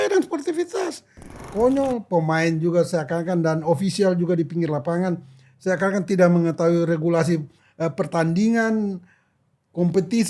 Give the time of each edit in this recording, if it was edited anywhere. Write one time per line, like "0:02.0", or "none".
0:01.5